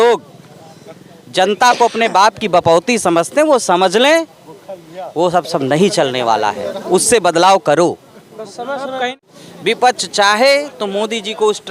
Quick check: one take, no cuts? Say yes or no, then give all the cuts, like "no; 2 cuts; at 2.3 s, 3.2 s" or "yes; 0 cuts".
no; 1 cut; at 9.1 s